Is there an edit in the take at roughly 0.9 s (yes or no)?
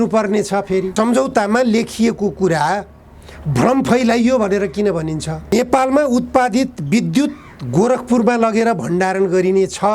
yes